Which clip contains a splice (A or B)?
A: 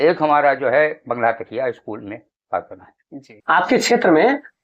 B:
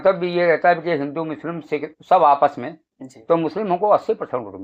A